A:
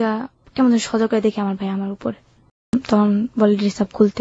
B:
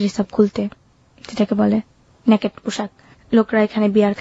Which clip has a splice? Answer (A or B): A